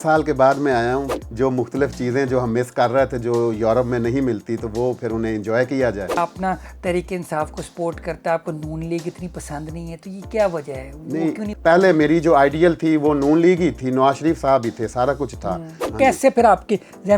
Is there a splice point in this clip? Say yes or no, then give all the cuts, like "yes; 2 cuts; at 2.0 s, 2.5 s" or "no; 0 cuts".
yes; 4 cuts; at 1.2 s, 6.2 s, 11.5 s, 15.8 s